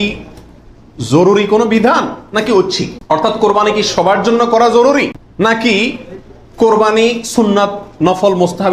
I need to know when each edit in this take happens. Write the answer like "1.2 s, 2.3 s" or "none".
2.9 s, 5.2 s